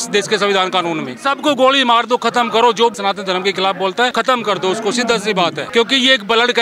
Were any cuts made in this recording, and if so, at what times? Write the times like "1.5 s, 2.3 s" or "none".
1.1 s, 3.0 s, 4.1 s, 5.6 s